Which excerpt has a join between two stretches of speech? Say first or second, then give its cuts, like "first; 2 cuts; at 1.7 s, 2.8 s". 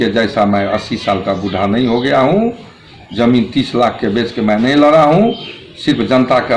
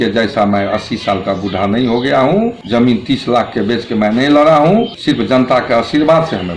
second; 2 cuts; at 2.6 s, 4.9 s